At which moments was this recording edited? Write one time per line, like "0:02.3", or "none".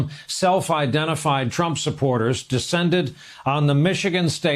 none